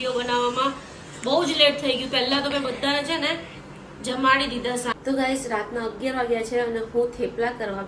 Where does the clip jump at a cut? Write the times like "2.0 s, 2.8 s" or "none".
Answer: 4.9 s